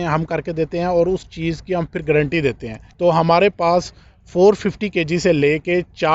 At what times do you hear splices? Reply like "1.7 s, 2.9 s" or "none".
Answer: 2.8 s